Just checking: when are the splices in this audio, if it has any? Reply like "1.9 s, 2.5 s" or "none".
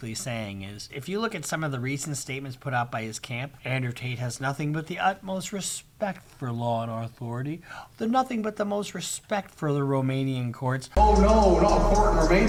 none

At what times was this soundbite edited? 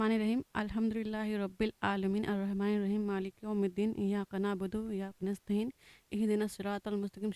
none

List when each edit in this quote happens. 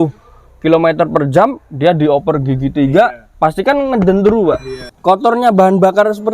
4.9 s

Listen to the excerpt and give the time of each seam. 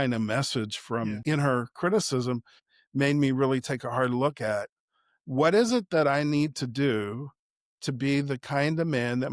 1.2 s, 2.6 s

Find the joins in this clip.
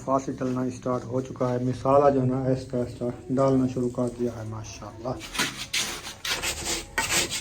5.3 s

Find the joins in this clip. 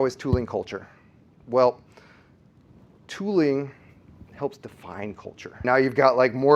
5.6 s

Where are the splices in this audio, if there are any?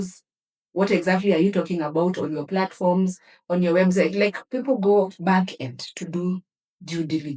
none

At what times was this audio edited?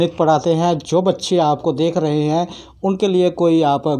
none

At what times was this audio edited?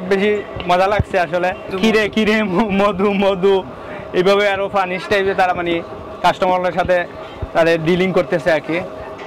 1.7 s

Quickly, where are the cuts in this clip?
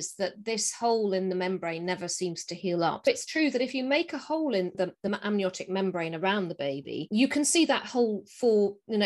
3.1 s, 4.8 s

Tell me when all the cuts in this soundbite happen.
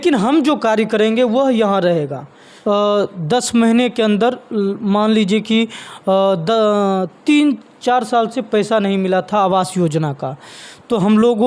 2.4 s

